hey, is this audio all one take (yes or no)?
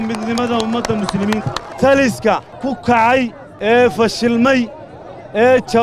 no